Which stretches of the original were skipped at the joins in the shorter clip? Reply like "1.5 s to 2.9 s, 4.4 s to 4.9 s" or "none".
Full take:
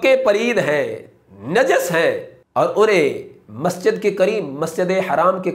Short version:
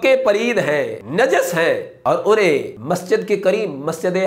1.0 s to 1.4 s, 2.3 s to 2.4 s, 3.3 s to 3.5 s

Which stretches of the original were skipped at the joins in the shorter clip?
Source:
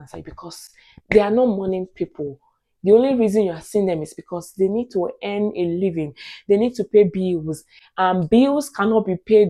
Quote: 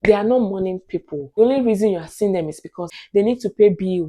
2.5 s to 2.9 s, 4.4 s to 6.2 s

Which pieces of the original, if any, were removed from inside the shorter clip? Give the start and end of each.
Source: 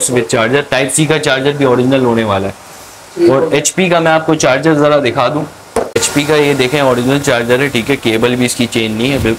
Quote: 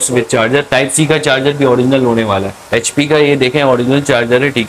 2.8 s to 6.0 s

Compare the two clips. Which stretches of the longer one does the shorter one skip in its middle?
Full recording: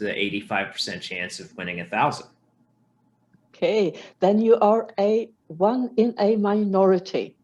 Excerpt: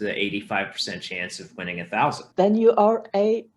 2.2 s to 4.1 s

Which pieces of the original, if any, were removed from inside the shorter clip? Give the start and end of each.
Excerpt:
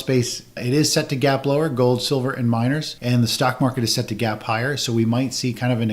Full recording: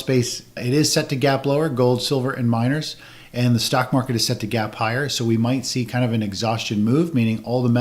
2.9 s to 3.2 s

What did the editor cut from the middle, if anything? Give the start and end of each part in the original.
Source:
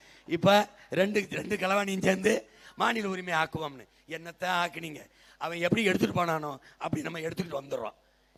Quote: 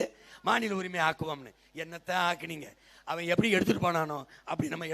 none

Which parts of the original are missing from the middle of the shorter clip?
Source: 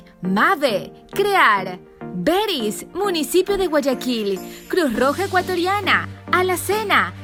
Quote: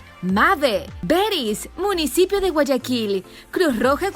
0.9 s to 2.1 s

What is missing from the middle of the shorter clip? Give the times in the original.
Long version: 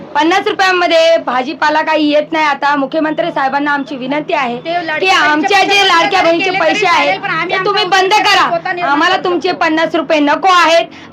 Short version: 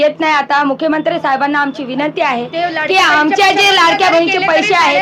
none

